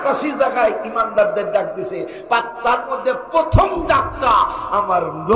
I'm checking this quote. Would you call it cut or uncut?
uncut